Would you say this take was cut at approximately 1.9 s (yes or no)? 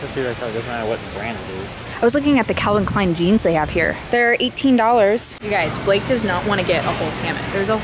yes